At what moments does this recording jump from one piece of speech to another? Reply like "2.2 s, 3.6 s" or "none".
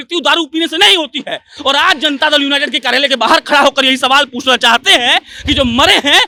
none

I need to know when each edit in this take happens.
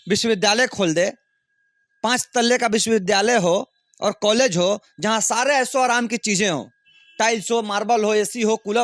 none

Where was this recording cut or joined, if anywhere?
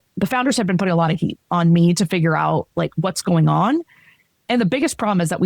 1.4 s

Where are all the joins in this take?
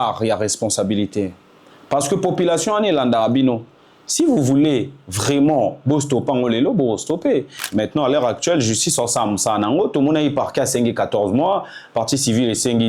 7.6 s

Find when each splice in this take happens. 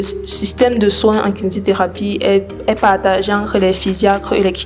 none

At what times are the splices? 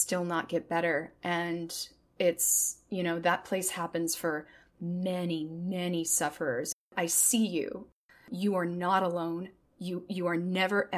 6.9 s, 7.9 s

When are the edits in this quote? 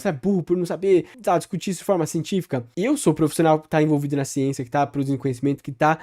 1.1 s, 2.7 s

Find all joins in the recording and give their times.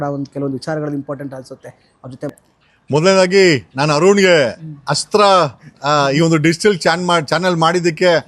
2.3 s

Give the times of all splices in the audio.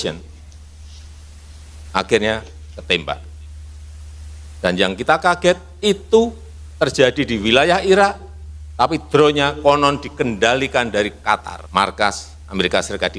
11.6 s

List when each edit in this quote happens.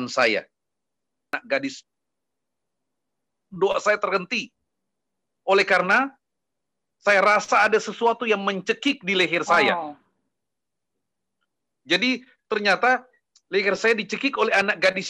1.3 s

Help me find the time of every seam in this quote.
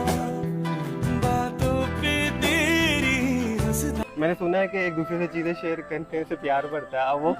4.0 s

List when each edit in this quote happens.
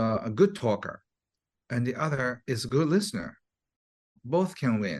4.1 s

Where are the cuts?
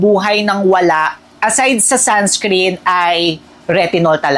none

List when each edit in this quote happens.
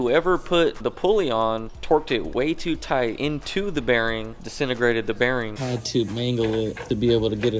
0.8 s, 3.2 s, 5.5 s, 6.8 s

